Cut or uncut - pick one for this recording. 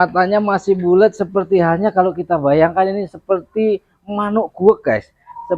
uncut